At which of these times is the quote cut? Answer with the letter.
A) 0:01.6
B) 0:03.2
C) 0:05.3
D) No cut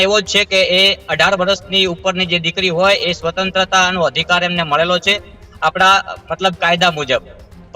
D